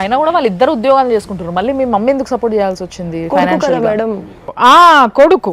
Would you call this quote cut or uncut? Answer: uncut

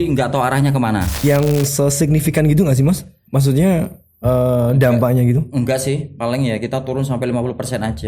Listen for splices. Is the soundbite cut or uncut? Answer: cut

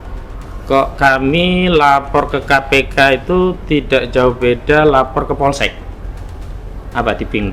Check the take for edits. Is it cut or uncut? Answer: uncut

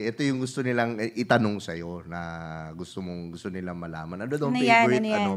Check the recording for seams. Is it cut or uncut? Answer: uncut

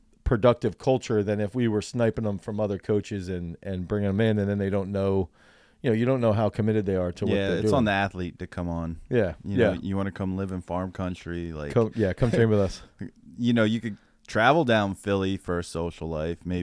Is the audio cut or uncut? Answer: uncut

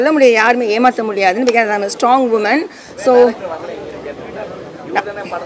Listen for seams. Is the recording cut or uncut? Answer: uncut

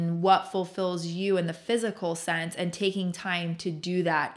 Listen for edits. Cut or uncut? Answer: uncut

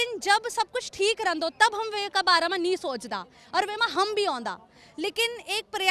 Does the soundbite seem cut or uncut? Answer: uncut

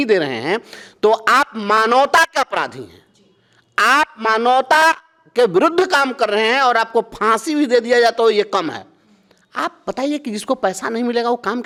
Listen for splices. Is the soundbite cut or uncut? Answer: uncut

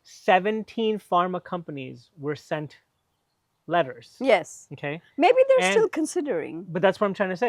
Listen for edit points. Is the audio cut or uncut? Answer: uncut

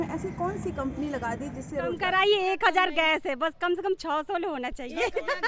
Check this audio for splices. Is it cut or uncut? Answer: cut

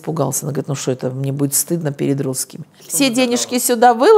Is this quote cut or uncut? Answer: cut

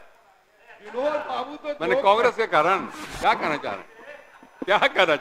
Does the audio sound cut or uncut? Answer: uncut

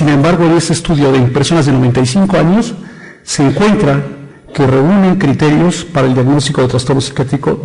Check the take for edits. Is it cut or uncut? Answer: uncut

